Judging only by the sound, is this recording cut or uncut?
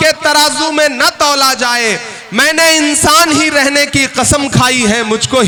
uncut